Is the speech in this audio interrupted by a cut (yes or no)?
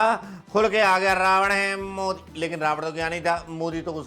no